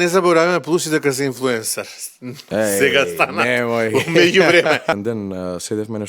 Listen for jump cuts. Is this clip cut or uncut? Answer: cut